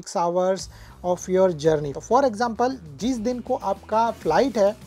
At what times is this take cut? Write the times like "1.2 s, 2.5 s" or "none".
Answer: 1.9 s